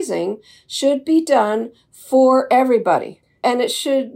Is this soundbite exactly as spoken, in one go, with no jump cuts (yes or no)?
no